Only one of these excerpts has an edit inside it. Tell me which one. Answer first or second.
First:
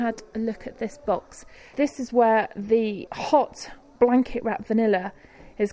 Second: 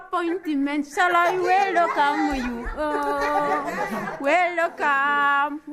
first